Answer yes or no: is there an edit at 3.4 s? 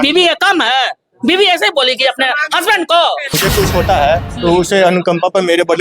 yes